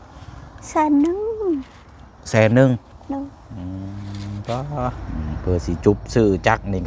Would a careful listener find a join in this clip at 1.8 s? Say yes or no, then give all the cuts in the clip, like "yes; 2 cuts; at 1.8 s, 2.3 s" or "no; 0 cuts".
no; 1 cut; at 5.0 s